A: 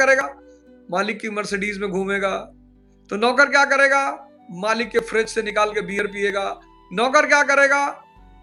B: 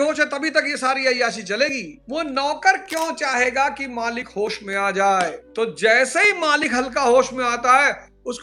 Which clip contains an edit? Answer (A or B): B